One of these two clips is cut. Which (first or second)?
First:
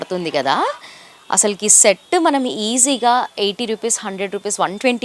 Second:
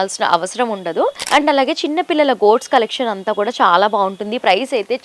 second